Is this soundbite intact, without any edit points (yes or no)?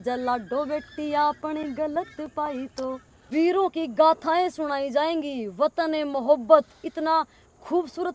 no